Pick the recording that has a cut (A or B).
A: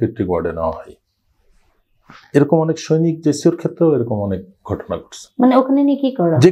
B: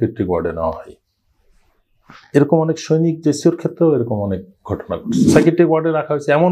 B